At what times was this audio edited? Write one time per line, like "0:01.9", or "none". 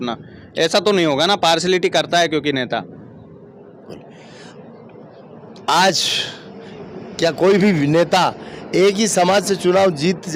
none

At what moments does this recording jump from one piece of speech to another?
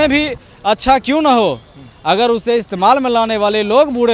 none

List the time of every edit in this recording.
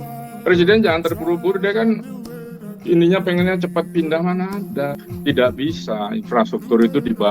0:05.0

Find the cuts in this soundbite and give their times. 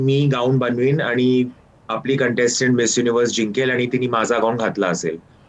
none

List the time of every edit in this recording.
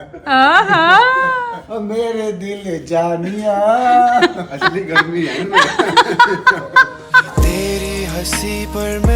0:07.3

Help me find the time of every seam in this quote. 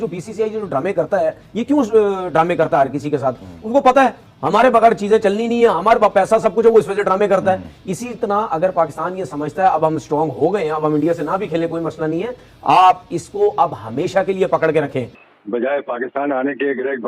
0:15.2

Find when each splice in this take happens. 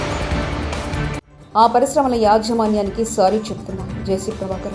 0:01.3

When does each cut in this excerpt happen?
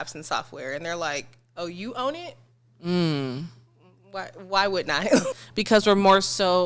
0:05.3

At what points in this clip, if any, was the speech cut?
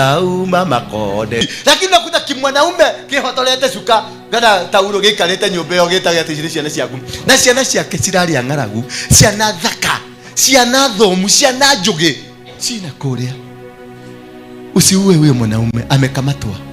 0:01.4

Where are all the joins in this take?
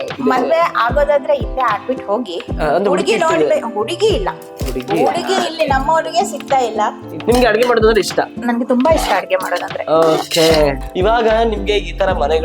0:07.2
0:10.8

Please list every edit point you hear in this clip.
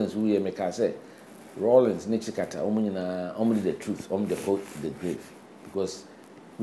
none

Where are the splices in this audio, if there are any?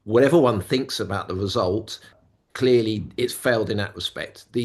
0:02.2

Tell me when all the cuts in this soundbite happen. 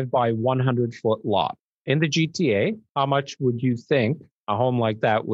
0:01.7
0:02.8
0:04.3

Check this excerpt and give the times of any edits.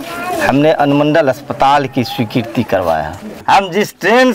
0:03.4

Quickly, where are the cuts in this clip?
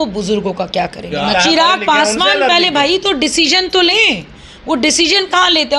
0:01.3

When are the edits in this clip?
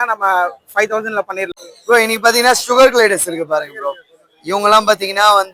0:01.5

